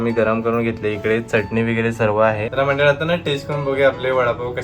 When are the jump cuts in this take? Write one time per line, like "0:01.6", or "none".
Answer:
0:02.5